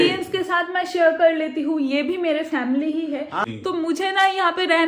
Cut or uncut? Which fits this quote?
cut